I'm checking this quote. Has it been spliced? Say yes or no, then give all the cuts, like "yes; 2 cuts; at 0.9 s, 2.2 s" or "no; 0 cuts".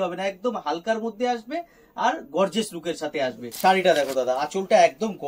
yes; 1 cut; at 3.4 s